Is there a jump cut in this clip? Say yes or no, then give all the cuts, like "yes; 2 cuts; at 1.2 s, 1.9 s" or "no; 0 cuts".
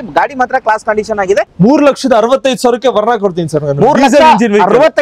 yes; 1 cut; at 1.5 s